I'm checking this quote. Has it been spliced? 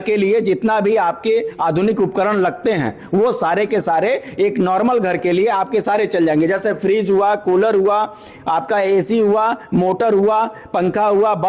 no; 0 cuts

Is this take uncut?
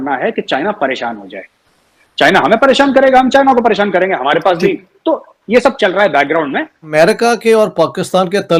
yes; 0 cuts

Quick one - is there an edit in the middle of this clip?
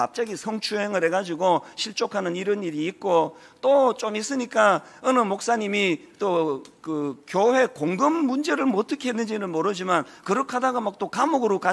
no; 0 cuts

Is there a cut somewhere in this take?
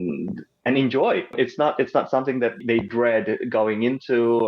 yes; 2 cuts; at 1.3 s, 2.6 s

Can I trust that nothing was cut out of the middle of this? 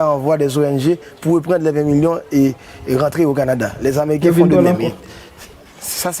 no; 1 cut; at 1.1 s

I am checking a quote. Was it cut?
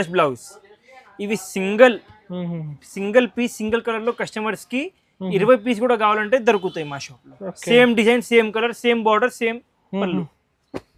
no; 0 cuts

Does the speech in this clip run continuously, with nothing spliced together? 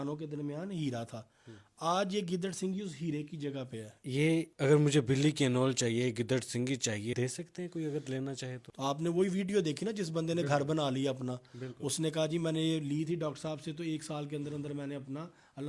no; 3 cuts; at 4.1 s, 7.1 s, 8.7 s

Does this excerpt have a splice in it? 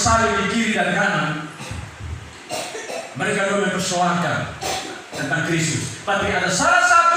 no; 0 cuts

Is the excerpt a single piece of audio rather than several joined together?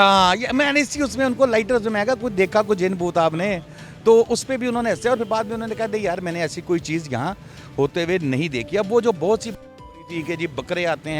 yes; 0 cuts

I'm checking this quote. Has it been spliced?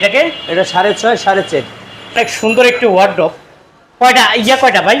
yes; 1 cut; at 2.2 s

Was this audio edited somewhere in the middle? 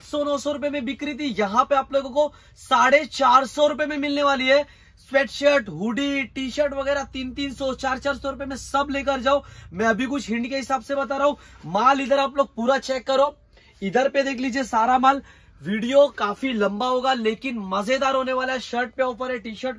no; 0 cuts

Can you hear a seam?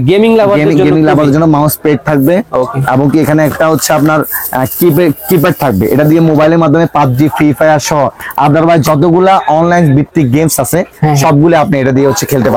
no; 0 cuts

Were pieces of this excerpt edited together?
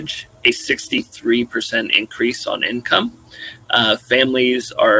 no; 0 cuts

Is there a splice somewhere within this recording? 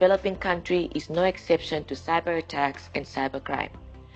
no; 0 cuts

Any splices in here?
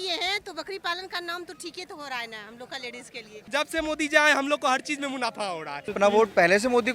yes; 2 cuts; at 3.5 s, 5.9 s

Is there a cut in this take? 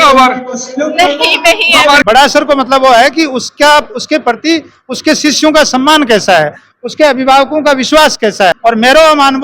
yes; 2 cuts; at 2.0 s, 8.6 s

